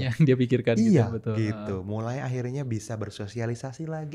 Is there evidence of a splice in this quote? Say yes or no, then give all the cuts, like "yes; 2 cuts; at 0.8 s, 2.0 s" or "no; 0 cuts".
no; 0 cuts